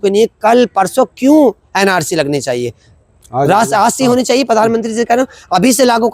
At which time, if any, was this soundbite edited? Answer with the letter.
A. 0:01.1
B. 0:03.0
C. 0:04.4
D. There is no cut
D